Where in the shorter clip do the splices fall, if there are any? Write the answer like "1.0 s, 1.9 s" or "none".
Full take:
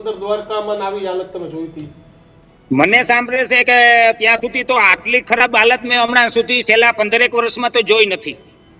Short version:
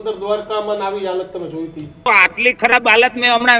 2.1 s